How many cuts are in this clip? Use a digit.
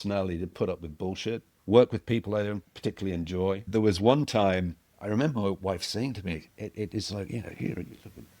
4